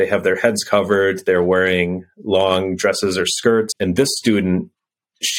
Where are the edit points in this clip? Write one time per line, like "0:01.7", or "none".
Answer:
0:03.7